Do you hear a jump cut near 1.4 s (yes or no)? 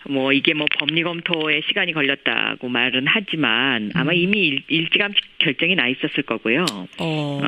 yes